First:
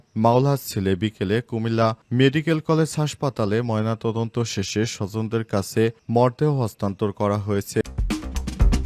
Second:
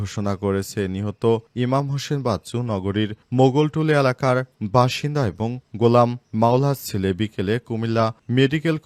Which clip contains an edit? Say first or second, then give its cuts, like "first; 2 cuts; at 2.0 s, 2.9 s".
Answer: first; 1 cut; at 7.8 s